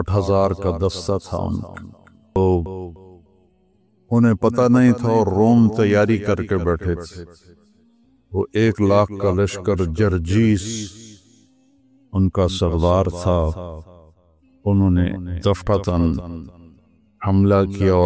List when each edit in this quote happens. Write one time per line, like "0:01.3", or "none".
0:02.4